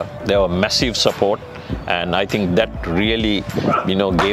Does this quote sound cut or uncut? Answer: uncut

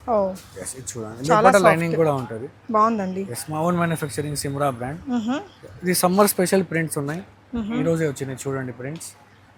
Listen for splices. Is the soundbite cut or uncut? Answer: uncut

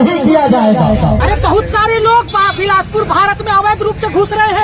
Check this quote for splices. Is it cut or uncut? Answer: cut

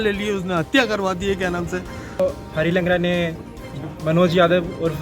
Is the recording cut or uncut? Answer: cut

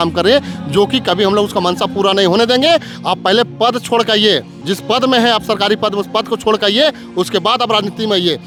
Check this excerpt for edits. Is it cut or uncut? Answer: uncut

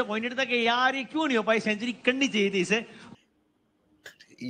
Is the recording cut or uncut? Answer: cut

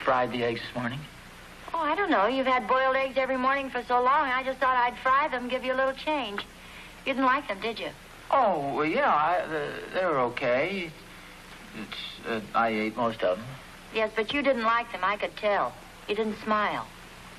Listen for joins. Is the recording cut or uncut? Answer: cut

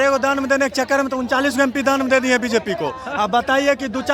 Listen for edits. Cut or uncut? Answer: uncut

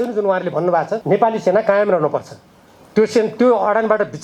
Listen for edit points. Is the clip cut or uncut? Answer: cut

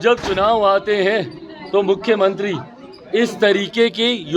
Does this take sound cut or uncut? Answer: uncut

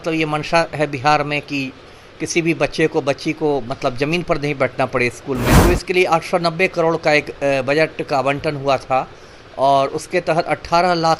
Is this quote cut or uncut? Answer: cut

